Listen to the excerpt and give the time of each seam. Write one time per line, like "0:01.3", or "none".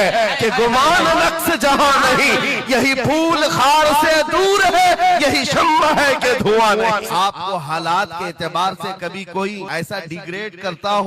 0:07.1
0:09.7